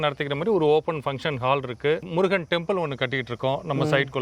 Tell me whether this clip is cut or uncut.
uncut